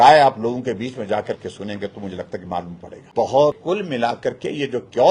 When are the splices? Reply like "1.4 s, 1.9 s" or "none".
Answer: 3.6 s